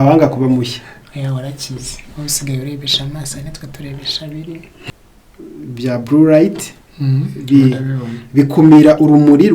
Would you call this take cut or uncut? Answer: cut